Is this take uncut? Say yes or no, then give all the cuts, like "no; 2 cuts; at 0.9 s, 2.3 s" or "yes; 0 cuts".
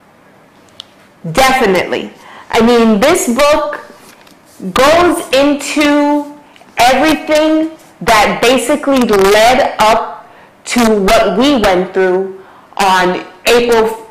no; 1 cut; at 1.7 s